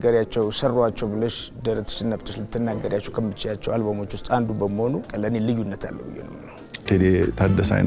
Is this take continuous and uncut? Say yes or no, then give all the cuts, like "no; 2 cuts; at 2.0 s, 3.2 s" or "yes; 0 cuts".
no; 2 cuts; at 5.1 s, 6.9 s